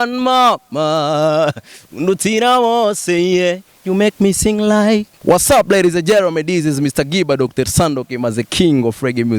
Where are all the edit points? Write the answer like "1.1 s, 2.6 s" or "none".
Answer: 5.1 s